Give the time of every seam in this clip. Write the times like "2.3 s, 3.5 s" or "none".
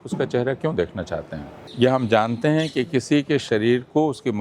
1.6 s